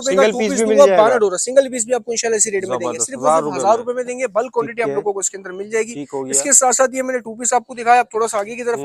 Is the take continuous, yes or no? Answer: yes